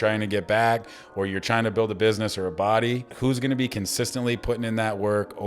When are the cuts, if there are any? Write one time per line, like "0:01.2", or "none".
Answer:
0:03.1